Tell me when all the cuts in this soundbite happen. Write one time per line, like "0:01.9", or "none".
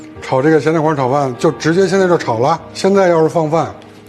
0:02.7